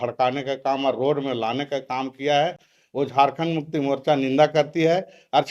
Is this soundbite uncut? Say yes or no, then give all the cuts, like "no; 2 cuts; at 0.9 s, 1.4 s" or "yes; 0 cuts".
yes; 0 cuts